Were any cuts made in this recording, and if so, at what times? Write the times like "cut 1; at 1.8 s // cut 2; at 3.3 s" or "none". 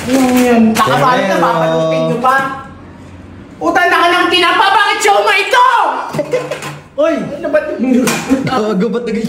none